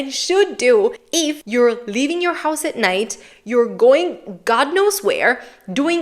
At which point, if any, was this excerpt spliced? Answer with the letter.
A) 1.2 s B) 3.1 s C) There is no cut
A